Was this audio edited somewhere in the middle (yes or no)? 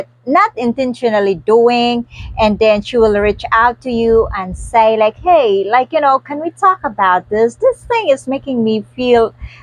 no